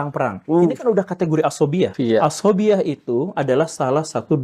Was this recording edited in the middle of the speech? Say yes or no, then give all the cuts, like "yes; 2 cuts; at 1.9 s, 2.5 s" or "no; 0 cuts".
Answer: yes; 1 cut; at 2.0 s